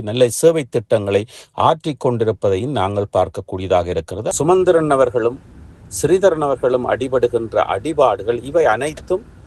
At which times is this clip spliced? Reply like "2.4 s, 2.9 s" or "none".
4.3 s